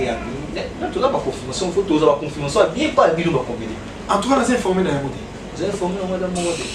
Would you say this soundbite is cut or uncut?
uncut